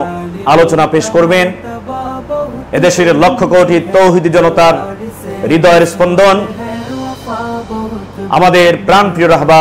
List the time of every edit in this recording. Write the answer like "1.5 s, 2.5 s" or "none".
6.5 s, 7.9 s